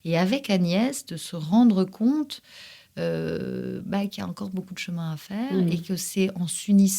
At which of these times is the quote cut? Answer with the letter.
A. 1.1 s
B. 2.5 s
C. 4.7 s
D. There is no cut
D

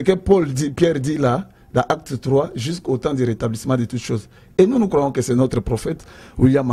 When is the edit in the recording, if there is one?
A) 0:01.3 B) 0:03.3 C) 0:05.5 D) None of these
D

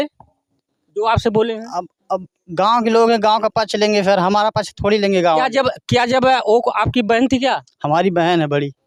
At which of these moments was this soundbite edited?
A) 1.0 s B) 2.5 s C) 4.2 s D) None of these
D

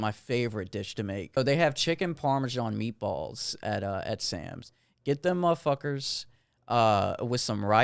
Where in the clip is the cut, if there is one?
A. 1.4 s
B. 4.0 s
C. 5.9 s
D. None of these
A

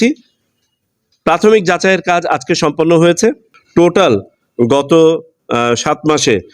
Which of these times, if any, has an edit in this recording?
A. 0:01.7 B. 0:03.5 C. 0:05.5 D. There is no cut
B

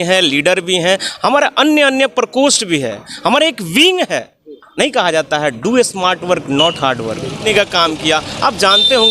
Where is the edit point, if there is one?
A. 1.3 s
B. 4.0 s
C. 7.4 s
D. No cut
C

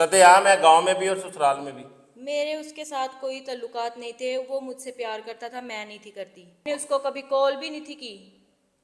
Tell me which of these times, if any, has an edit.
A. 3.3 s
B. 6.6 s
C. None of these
B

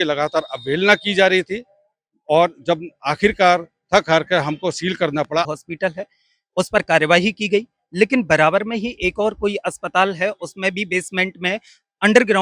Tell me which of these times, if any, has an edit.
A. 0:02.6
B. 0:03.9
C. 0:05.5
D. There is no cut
C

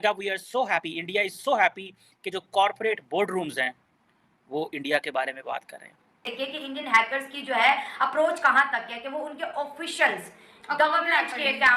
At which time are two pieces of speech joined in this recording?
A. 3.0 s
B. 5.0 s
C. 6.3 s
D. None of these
C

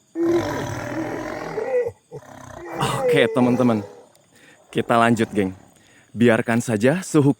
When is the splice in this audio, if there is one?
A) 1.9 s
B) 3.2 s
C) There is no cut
B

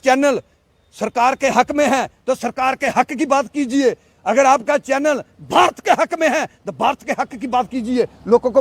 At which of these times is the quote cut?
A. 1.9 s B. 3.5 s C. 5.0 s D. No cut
D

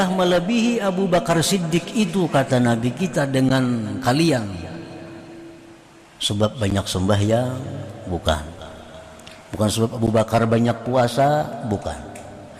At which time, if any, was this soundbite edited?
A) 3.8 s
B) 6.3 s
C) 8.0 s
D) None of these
D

